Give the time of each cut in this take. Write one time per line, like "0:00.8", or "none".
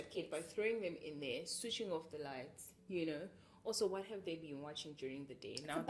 none